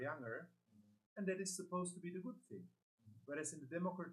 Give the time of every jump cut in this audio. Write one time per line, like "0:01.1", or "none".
none